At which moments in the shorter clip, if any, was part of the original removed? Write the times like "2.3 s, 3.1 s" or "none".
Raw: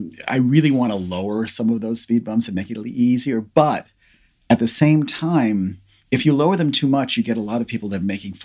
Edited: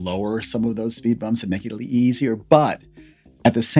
none